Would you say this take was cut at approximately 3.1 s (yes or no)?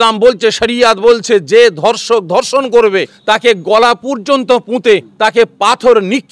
yes